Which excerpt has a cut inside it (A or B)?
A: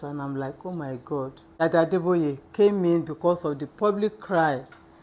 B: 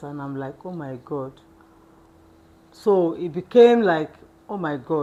A